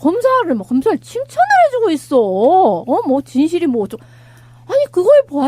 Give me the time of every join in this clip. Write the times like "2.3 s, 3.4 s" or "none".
3.6 s